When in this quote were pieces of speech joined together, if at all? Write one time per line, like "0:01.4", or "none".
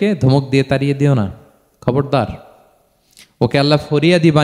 none